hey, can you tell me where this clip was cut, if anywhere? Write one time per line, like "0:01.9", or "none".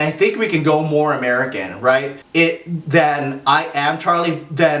0:02.2

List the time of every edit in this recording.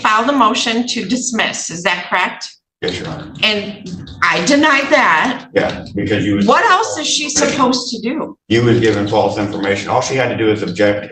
none

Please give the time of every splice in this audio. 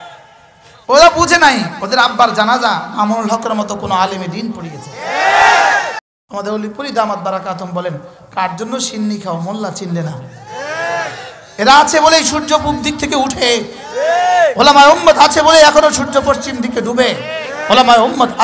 0:06.0

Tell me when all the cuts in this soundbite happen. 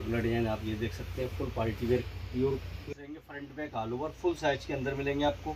0:02.7

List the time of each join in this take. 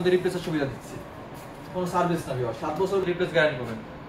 0:03.0

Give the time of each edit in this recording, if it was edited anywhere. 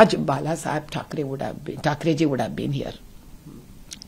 none

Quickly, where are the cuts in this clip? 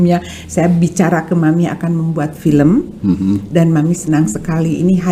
none

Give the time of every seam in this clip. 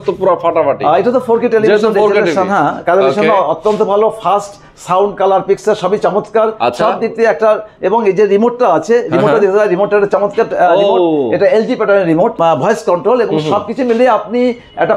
none

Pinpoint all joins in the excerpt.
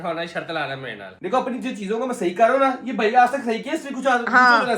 0:01.1

